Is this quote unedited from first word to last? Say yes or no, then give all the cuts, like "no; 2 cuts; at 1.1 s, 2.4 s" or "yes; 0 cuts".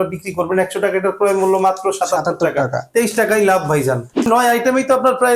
no; 1 cut; at 4.3 s